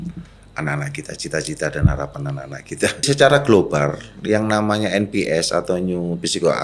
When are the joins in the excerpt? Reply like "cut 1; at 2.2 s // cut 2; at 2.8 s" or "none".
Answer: cut 1; at 3.0 s